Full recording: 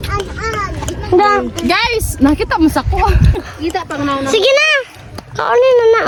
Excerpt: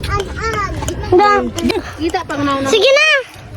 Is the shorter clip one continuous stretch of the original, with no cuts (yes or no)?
no